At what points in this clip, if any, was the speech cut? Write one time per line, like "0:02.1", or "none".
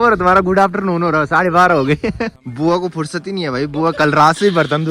0:02.4